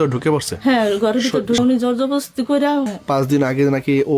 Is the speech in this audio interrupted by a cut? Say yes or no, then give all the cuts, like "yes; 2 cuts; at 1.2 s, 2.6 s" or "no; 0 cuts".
yes; 2 cuts; at 1.6 s, 2.9 s